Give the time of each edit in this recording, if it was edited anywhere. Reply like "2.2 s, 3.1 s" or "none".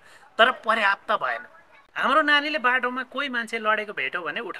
2.0 s